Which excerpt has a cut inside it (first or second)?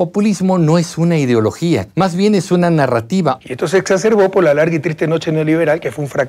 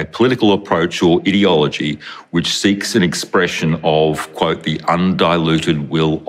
first